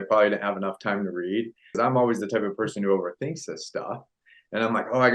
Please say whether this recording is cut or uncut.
cut